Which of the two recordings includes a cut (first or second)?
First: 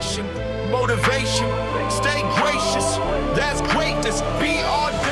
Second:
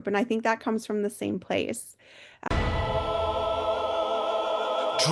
second